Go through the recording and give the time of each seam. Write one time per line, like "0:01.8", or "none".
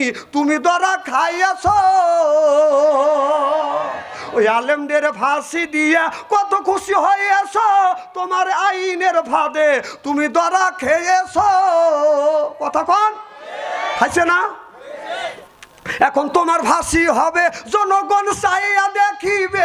none